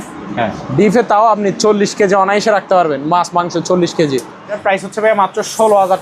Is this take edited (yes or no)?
yes